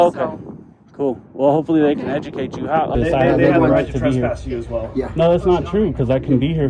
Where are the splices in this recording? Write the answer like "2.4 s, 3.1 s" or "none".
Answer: 2.9 s